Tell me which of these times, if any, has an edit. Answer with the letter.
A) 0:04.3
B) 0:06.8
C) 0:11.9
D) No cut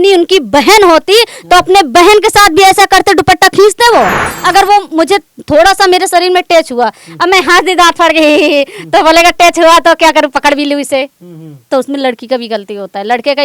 A